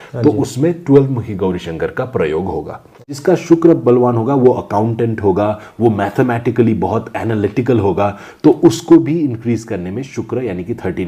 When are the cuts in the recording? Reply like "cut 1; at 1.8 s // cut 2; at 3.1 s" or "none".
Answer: cut 1; at 3.2 s